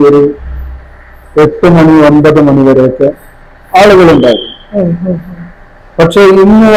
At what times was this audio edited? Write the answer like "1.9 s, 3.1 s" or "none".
none